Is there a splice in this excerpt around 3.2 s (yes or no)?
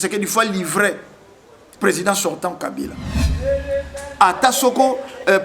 yes